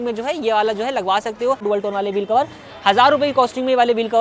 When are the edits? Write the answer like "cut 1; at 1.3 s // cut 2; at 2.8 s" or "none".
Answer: cut 1; at 1.6 s